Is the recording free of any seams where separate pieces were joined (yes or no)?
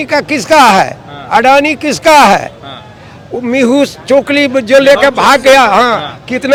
yes